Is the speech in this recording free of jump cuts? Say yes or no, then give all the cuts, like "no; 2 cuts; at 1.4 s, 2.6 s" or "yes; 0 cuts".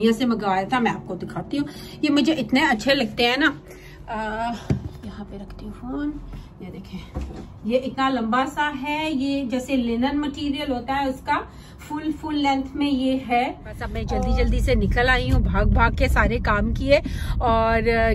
yes; 0 cuts